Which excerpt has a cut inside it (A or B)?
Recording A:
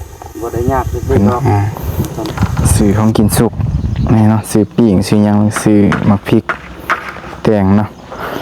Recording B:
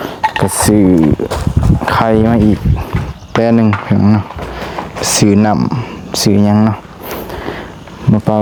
A